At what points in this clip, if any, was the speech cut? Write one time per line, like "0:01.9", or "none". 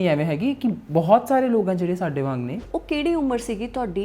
0:02.6